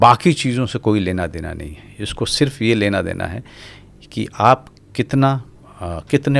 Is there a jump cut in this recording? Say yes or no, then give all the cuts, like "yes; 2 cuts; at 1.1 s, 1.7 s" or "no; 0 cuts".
no; 0 cuts